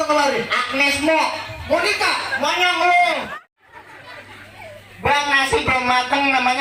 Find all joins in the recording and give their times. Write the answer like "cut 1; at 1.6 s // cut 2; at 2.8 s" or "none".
cut 1; at 3.3 s